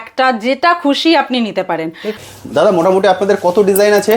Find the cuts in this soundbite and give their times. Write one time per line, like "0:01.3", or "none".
0:02.2